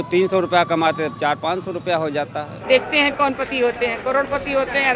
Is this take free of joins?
no; 1 cut; at 2.6 s

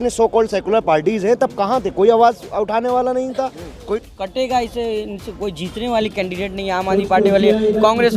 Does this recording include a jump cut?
yes; 1 cut; at 3.8 s

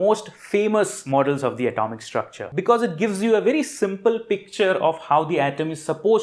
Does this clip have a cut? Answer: yes; 2 cuts; at 1.0 s, 2.4 s

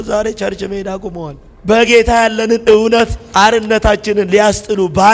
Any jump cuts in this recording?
yes; 1 cut; at 1.4 s

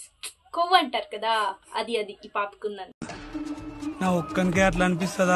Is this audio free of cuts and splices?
yes; 0 cuts

